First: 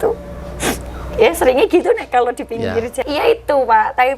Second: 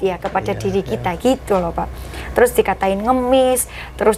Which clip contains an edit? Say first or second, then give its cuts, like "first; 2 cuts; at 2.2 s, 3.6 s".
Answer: first; 1 cut; at 3.0 s